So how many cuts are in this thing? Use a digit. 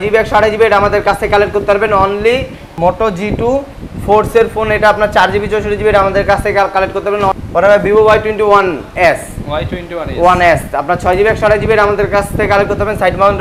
2